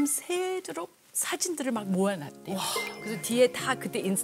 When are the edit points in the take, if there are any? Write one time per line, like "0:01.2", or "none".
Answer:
none